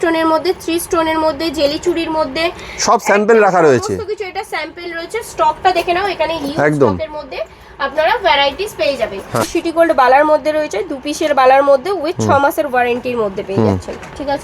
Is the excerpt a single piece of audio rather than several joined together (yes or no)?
no